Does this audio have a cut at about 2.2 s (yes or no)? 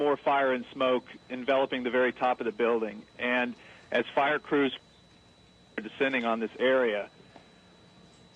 yes